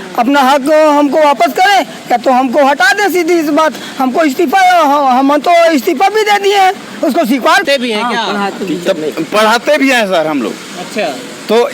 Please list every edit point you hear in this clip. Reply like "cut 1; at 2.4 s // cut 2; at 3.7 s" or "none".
cut 1; at 7.6 s